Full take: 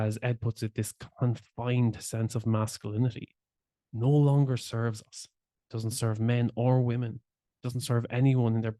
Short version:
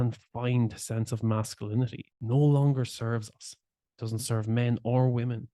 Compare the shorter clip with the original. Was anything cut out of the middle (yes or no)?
yes